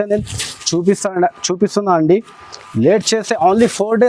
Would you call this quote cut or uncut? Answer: uncut